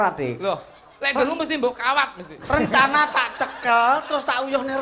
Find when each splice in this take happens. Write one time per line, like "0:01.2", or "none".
none